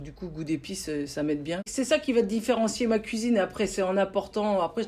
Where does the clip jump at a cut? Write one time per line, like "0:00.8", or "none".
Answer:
0:01.7